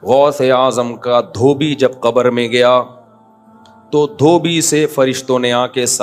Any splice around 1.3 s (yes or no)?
no